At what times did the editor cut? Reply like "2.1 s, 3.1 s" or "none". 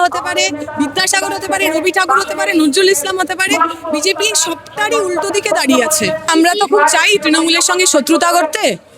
6.3 s